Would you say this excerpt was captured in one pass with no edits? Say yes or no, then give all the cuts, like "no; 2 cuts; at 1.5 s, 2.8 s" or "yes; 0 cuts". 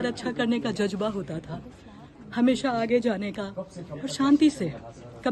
yes; 0 cuts